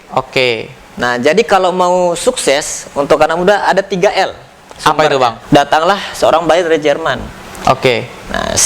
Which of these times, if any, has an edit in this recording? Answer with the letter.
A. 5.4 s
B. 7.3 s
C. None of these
A